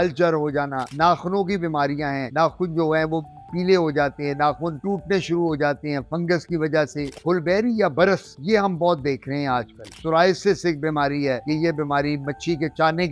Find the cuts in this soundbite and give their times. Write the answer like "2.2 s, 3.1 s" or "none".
7.1 s, 9.8 s, 11.4 s